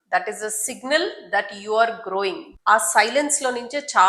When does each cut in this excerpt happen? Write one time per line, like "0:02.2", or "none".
0:02.5